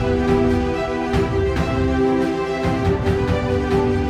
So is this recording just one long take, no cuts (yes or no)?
yes